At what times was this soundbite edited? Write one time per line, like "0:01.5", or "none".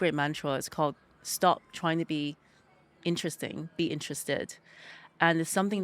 none